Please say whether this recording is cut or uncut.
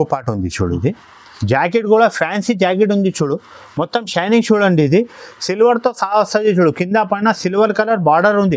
uncut